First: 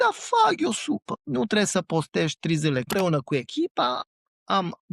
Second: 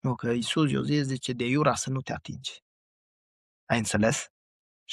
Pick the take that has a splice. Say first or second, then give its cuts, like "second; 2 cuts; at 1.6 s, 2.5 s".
first; 3 cuts; at 1.1 s, 2.9 s, 4.0 s